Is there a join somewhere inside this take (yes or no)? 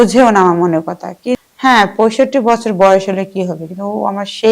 yes